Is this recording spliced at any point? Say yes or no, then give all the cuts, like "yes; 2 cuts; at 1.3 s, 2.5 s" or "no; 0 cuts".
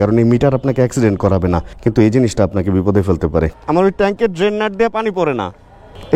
yes; 1 cut; at 3.5 s